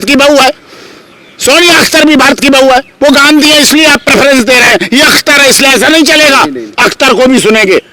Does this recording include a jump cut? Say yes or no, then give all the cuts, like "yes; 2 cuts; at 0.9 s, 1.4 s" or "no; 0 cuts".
no; 0 cuts